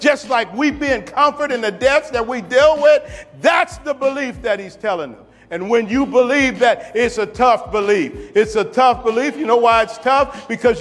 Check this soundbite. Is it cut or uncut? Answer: uncut